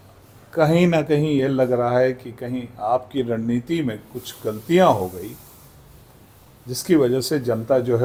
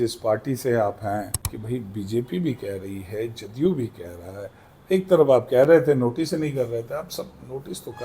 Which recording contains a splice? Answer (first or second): second